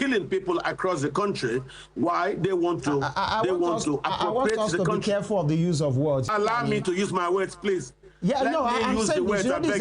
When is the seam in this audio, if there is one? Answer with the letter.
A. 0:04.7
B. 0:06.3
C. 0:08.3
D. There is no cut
B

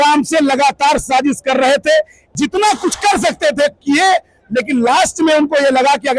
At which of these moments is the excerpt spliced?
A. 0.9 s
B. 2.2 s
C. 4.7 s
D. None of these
B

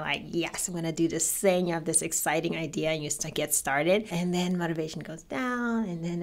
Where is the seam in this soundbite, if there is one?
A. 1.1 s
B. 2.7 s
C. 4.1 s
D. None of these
C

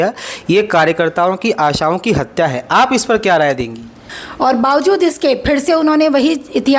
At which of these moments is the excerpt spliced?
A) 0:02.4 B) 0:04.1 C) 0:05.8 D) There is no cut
B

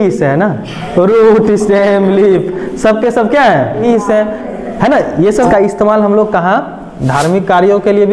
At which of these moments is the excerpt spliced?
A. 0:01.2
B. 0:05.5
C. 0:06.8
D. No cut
B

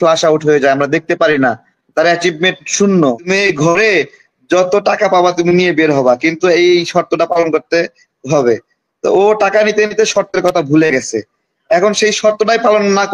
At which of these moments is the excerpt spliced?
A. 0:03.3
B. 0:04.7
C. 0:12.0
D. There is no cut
A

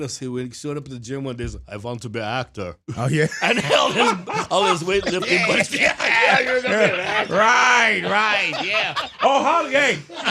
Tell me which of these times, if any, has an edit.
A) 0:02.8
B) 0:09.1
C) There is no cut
A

